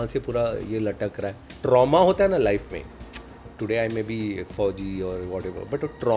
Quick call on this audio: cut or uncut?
cut